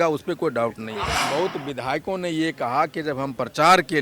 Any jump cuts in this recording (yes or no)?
yes